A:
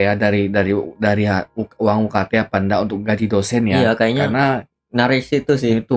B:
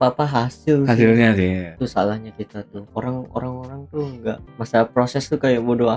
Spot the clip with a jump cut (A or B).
B